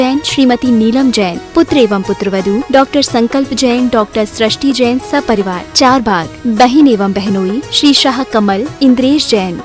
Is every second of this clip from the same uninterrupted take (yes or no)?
yes